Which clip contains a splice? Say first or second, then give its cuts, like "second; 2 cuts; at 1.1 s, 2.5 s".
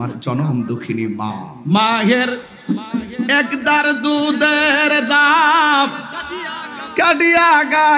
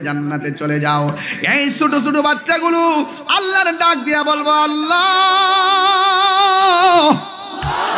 first; 1 cut; at 1.5 s